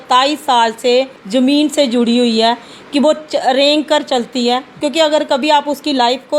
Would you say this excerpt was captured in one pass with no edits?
no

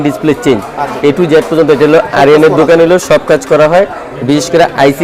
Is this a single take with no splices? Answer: yes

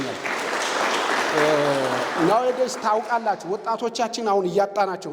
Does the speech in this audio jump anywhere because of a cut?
no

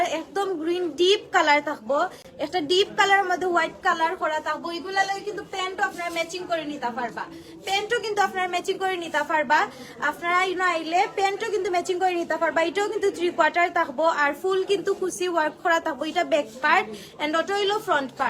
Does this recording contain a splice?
no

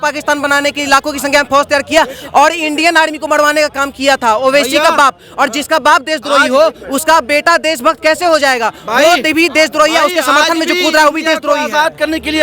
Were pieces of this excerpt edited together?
no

